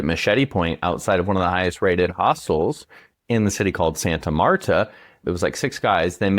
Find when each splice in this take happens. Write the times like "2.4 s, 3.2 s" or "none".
5.2 s